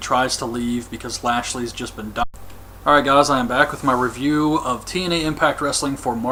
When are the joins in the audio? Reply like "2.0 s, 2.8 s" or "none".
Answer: none